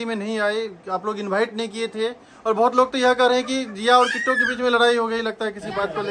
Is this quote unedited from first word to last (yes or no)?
yes